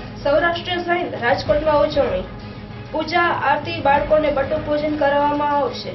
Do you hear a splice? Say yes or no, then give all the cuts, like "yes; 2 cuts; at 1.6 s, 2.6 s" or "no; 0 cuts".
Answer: no; 0 cuts